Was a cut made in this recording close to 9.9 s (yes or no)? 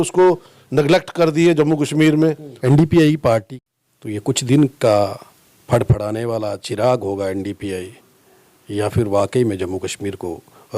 no